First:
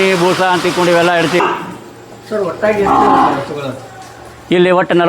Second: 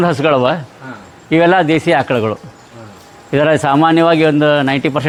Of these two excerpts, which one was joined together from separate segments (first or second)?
first